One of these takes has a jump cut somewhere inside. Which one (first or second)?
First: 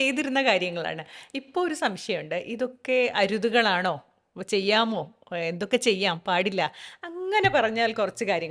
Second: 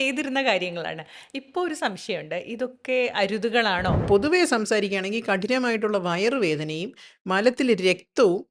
second